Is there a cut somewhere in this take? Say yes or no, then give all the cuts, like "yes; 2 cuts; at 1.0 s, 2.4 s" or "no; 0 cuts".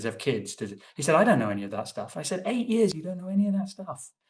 no; 0 cuts